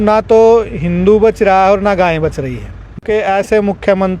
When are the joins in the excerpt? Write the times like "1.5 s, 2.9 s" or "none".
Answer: 2.9 s